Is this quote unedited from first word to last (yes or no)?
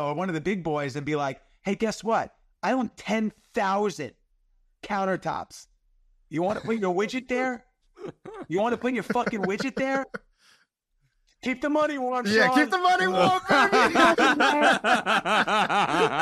yes